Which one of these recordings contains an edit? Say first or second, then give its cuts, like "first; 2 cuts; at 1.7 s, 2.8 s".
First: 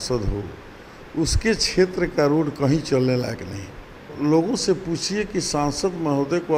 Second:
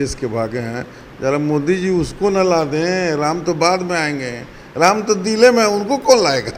first; 1 cut; at 4.1 s